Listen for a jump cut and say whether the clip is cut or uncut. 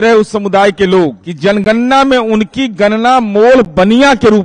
cut